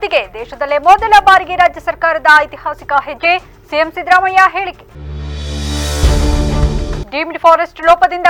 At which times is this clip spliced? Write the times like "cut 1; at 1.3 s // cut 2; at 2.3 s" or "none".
none